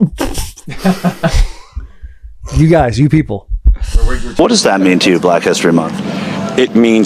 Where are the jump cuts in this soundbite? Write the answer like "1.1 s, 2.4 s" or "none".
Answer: 4.2 s